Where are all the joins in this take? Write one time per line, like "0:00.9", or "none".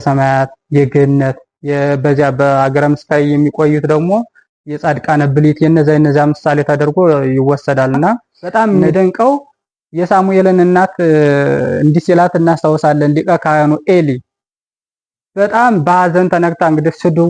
0:08.3